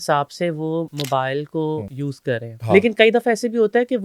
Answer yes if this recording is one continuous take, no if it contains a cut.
no